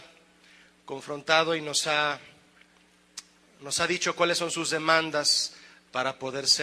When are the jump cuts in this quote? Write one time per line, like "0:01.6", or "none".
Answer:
none